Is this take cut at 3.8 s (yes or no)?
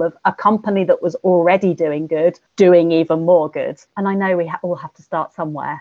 yes